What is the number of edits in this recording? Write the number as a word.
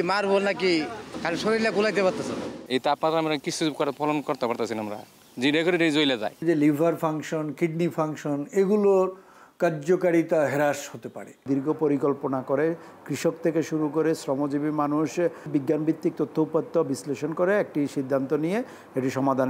five